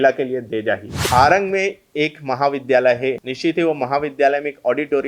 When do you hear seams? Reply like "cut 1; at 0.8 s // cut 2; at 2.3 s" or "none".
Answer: cut 1; at 1.1 s // cut 2; at 3.3 s